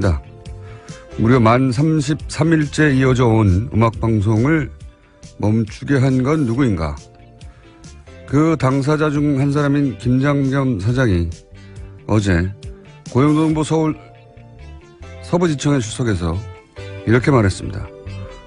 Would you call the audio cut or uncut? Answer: cut